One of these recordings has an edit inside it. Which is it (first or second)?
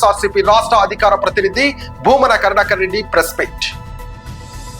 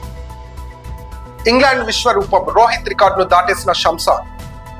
first